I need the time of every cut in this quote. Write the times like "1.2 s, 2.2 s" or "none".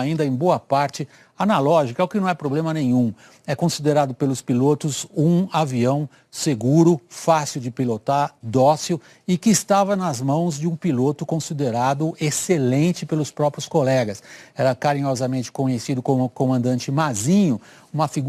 13.0 s